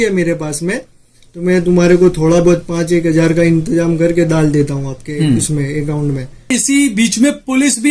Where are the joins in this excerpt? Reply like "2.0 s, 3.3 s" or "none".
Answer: 6.5 s